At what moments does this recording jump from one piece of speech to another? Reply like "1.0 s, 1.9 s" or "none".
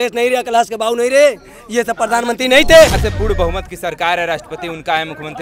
3.1 s